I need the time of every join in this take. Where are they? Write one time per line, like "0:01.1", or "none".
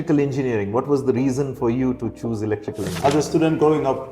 0:02.9